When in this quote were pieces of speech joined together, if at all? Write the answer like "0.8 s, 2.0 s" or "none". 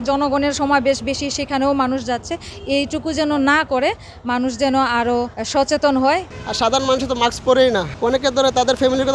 5.4 s, 6.3 s, 7.9 s